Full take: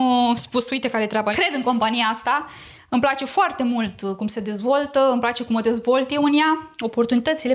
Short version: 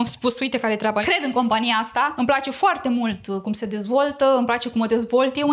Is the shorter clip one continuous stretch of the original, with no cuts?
no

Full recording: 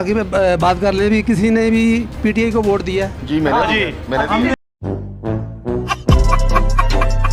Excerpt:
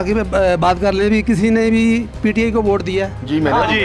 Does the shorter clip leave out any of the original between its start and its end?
no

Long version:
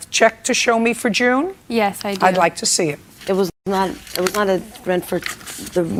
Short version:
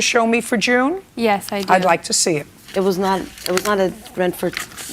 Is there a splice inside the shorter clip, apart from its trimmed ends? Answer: yes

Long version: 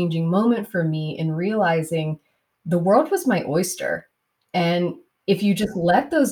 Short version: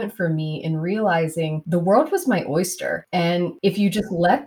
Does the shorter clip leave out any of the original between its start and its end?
yes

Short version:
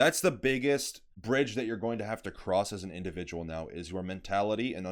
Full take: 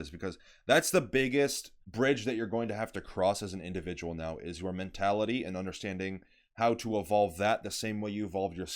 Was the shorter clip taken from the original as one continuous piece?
yes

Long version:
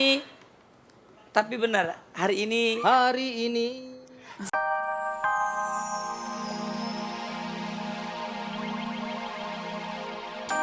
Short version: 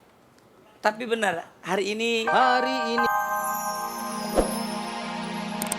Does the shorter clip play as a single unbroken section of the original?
no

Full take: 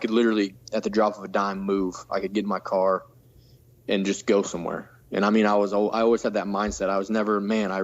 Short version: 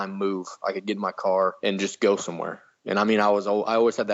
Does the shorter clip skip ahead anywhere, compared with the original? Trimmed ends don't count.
yes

